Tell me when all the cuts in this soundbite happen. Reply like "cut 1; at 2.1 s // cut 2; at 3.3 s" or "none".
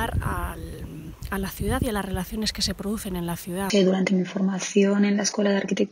cut 1; at 3.7 s